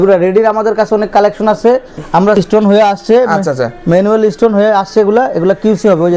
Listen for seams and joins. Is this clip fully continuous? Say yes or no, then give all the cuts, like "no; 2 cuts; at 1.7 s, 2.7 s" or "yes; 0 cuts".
no; 1 cut; at 2.4 s